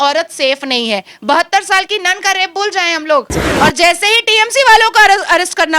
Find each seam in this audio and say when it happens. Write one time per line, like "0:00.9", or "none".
0:03.5